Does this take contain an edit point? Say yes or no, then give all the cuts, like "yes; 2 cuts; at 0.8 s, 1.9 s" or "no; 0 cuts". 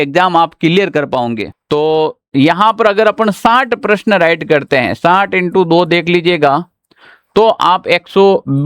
yes; 1 cut; at 1.5 s